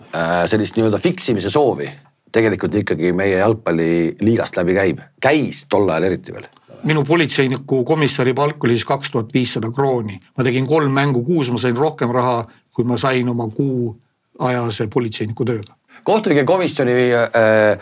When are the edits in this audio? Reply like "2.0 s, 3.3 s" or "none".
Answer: 6.8 s, 15.9 s